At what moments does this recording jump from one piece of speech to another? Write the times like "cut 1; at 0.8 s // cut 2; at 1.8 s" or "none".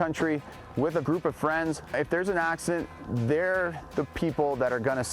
cut 1; at 1.0 s // cut 2; at 1.9 s